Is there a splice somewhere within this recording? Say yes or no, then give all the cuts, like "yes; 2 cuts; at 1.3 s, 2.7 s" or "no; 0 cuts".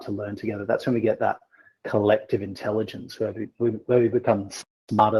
no; 0 cuts